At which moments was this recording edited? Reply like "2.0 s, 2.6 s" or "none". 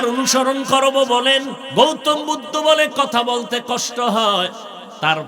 1.6 s